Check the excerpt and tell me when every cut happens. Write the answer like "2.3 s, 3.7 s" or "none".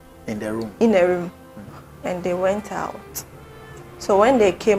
none